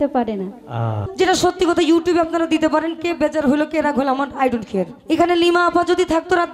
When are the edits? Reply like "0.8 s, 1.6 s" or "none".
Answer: 1.0 s, 5.0 s